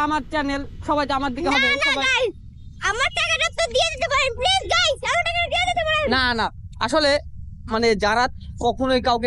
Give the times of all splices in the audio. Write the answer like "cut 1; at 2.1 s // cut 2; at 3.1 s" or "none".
none